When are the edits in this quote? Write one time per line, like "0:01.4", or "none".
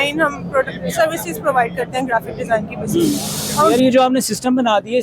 0:03.7